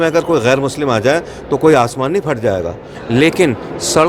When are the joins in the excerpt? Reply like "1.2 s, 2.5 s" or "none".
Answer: 2.9 s